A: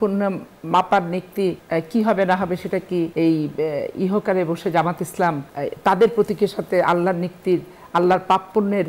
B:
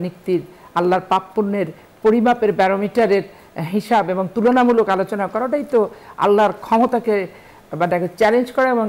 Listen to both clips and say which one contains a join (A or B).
A